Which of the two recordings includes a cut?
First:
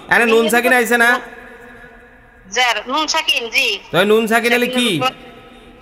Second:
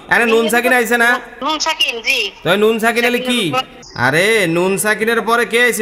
second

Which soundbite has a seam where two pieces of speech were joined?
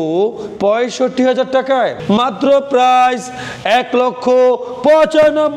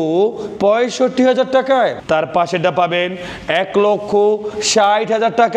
first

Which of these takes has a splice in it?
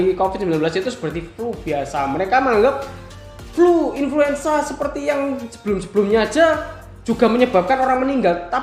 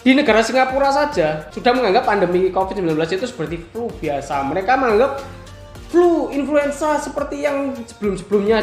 second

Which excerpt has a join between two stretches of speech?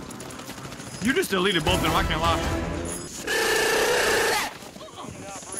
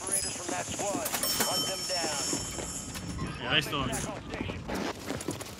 first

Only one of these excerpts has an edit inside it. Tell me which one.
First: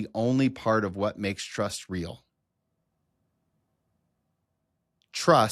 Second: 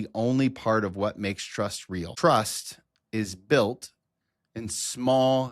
second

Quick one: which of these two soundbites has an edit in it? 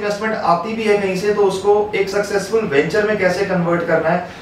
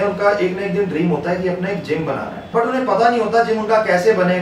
second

